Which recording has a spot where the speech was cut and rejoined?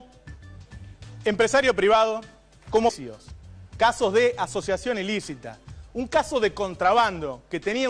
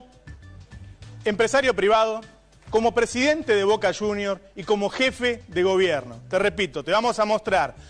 second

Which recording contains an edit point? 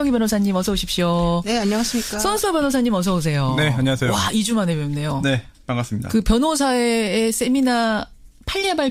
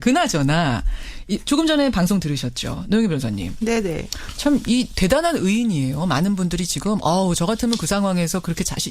second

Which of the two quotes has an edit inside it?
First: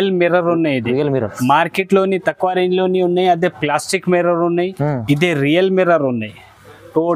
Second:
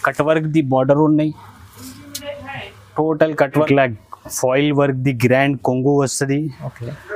second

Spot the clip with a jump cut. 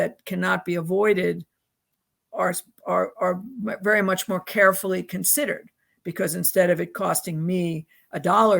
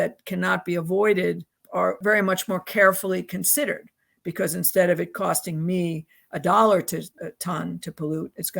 second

